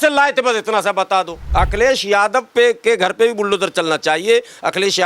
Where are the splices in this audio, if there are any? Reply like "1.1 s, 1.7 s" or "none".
1.4 s